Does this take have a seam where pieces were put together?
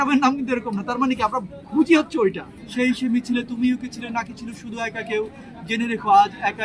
yes; 1 cut; at 2.4 s

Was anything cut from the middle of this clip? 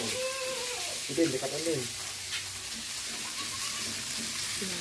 no; 0 cuts

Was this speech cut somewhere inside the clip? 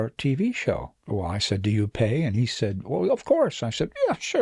yes; 1 cut; at 0.9 s

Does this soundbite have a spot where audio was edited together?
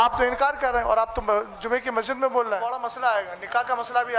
yes; 1 cut; at 2.8 s

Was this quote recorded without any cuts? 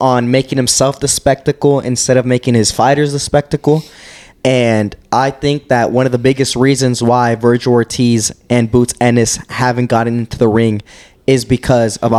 yes; 0 cuts

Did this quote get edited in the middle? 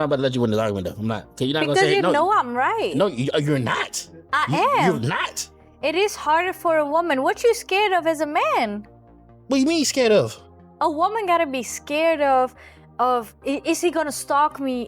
yes; 1 cut; at 1.3 s

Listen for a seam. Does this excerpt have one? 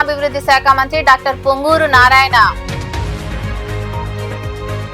yes; 2 cuts; at 2.7 s, 4.2 s

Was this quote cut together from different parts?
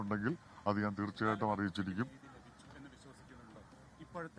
no; 0 cuts

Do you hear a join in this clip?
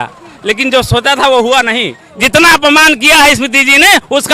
yes; 1 cut; at 2.0 s

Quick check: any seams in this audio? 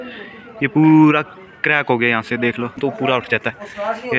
yes; 1 cut; at 2.8 s

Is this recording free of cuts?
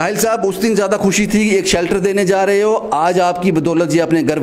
yes; 0 cuts

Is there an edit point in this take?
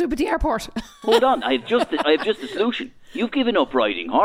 no; 0 cuts

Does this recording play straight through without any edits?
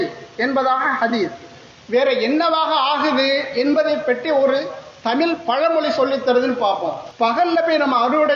no; 1 cut; at 7.0 s

